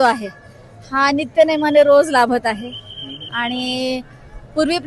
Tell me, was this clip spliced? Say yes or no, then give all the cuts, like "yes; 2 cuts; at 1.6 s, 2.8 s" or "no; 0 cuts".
no; 0 cuts